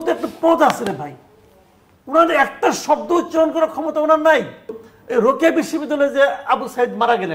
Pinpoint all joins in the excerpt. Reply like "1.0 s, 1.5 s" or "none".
4.9 s